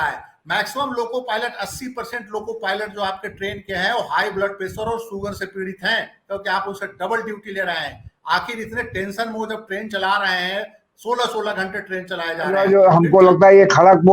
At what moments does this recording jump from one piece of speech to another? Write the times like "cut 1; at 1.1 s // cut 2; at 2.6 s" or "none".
cut 1; at 12.6 s